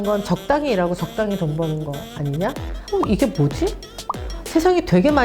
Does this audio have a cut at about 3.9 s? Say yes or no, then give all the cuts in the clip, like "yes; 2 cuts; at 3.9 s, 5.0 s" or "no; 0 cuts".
no; 1 cut; at 2.7 s